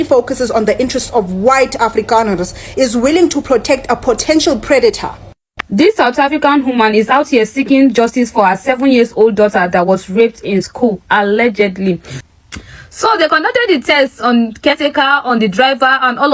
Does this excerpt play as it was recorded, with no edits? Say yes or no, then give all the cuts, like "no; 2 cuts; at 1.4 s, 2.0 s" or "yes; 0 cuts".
no; 2 cuts; at 5.5 s, 12.1 s